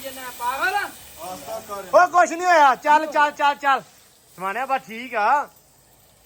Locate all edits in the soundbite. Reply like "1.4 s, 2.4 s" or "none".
none